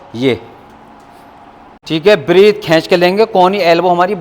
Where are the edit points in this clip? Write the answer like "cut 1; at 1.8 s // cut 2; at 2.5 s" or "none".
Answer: cut 1; at 1.9 s